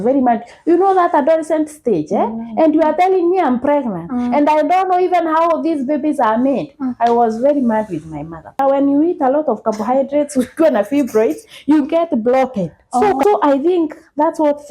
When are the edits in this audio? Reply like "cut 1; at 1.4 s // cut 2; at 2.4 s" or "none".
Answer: cut 1; at 8.6 s // cut 2; at 13.2 s